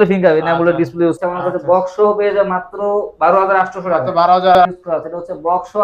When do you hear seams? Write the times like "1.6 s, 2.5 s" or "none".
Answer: 1.2 s, 4.6 s